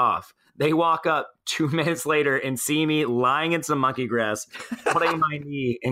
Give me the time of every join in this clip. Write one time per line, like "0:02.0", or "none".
none